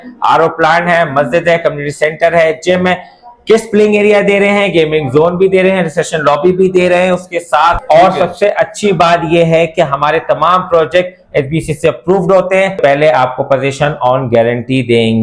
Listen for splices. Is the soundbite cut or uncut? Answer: cut